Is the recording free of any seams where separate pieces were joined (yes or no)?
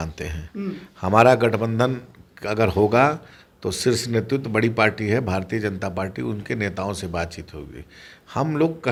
yes